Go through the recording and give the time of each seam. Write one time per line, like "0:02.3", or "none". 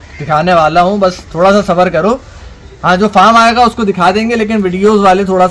none